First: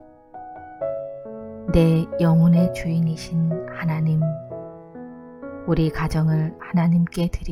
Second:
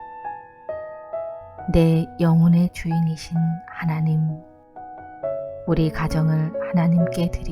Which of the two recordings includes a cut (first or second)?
second